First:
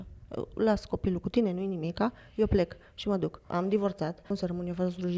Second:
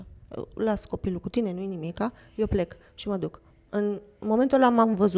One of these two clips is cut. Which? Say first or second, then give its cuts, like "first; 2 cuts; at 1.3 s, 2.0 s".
first; 2 cuts; at 3.4 s, 4.2 s